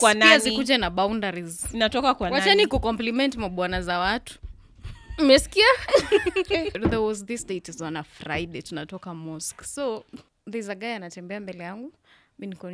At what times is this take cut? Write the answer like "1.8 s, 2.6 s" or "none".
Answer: 6.7 s, 10.3 s